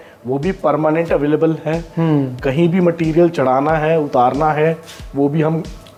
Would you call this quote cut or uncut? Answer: uncut